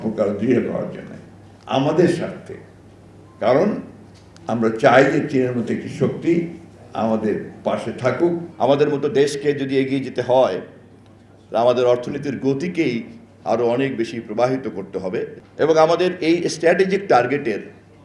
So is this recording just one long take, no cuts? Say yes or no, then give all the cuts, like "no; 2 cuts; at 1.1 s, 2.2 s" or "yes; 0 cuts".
no; 2 cuts; at 8.5 s, 15.4 s